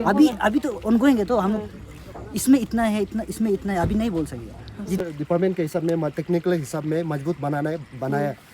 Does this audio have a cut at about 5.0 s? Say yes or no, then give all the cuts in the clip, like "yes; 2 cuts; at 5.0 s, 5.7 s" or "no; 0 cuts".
yes; 1 cut; at 5.0 s